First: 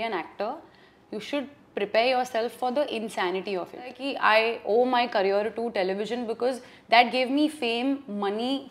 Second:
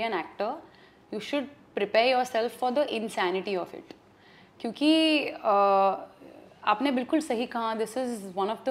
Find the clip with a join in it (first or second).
first